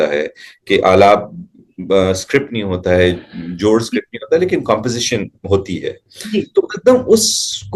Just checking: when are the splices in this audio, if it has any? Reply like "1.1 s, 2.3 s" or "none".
none